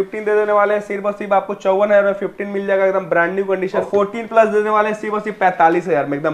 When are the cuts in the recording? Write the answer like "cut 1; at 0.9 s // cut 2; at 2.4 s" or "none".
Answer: cut 1; at 3.8 s